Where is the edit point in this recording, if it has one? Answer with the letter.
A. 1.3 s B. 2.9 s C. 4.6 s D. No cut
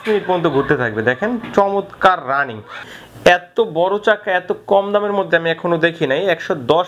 B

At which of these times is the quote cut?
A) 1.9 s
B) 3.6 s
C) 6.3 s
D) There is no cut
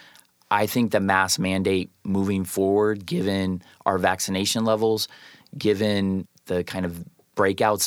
C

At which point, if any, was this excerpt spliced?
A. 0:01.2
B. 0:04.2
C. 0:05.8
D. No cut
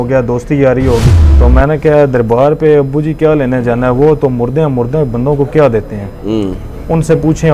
A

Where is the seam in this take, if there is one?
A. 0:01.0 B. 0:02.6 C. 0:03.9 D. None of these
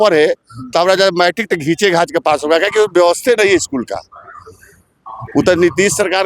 D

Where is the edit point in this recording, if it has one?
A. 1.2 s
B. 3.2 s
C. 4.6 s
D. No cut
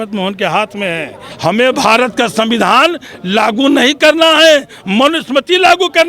A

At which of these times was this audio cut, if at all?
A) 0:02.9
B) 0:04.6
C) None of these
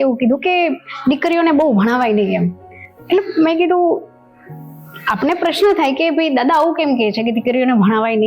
C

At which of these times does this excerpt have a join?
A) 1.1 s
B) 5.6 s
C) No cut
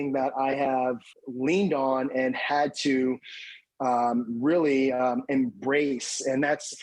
A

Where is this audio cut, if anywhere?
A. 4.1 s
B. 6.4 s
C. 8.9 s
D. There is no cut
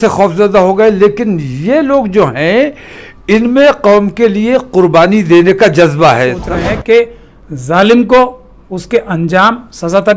B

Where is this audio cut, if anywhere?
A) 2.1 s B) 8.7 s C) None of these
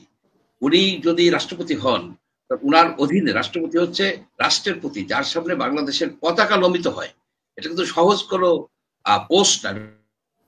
C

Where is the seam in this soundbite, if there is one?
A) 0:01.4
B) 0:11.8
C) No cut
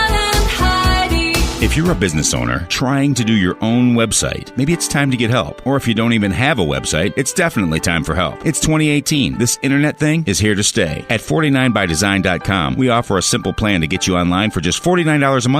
A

